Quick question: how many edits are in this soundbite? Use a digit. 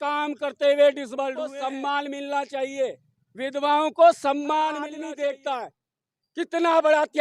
2